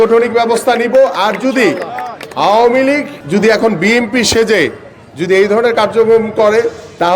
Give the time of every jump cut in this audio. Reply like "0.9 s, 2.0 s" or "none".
3.2 s